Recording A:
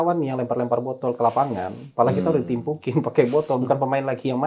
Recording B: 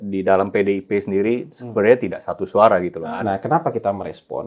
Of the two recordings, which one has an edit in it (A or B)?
B